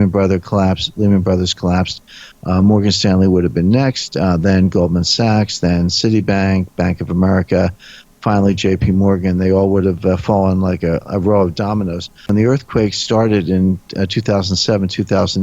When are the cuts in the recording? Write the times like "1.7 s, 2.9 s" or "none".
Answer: 12.3 s